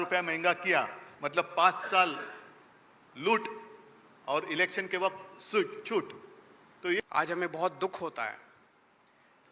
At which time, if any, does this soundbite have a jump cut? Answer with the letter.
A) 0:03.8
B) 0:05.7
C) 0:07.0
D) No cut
C